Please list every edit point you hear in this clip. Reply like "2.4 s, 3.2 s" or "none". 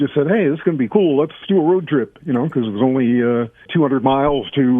1.4 s, 3.7 s